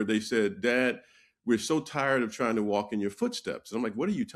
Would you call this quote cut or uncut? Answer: uncut